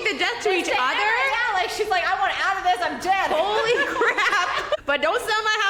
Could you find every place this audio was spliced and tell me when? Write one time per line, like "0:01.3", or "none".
none